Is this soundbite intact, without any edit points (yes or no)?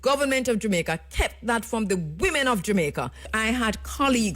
no